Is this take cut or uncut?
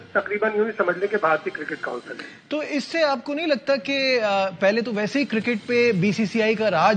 uncut